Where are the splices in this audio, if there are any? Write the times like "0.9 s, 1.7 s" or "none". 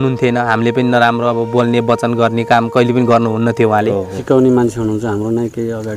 4.2 s